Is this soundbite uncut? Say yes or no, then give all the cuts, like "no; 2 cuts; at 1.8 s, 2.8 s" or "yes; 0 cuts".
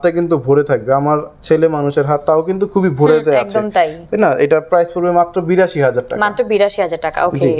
yes; 0 cuts